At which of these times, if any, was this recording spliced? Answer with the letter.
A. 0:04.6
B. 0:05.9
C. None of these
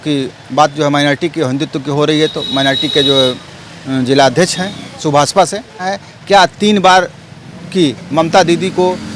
B